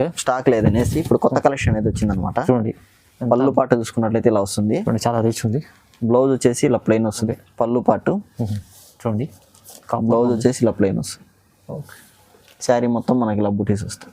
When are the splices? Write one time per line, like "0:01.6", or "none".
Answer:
0:07.2